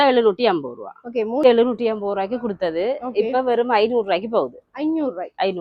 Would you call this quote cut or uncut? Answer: cut